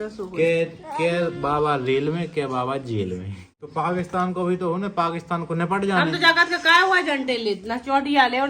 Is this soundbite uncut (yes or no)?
no